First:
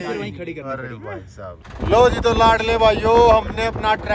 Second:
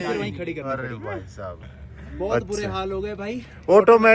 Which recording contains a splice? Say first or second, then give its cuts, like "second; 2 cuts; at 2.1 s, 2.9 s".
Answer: first; 1 cut; at 1.7 s